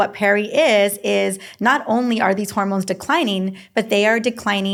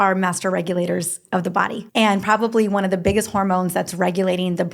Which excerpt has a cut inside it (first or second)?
second